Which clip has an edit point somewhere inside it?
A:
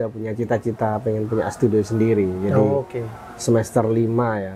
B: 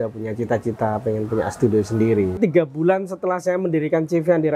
B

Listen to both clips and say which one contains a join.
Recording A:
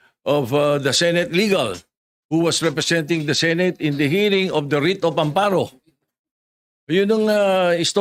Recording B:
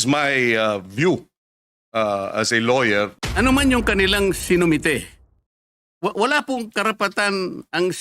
B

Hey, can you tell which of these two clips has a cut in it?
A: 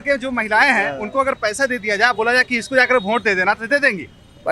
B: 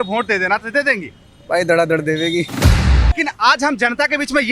B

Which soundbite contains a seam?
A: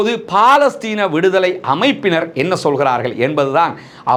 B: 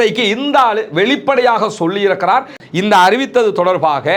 B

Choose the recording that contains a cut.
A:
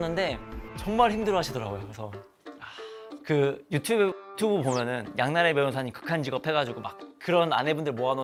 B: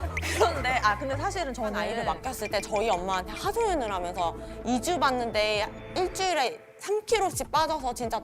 B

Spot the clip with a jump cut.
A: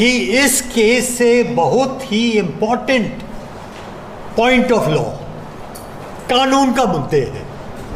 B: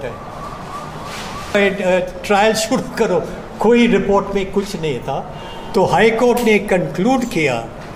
B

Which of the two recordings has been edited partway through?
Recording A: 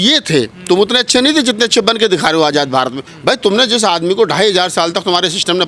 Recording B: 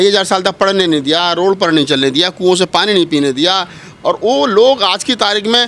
A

